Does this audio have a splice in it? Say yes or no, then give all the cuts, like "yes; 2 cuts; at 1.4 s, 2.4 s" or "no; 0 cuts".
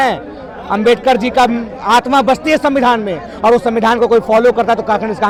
no; 0 cuts